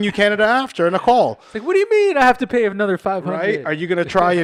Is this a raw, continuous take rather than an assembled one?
yes; 0 cuts

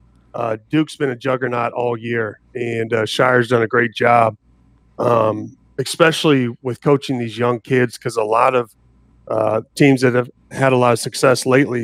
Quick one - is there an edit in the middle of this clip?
no; 0 cuts

